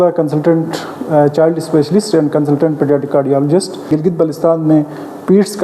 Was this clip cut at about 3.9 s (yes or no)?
yes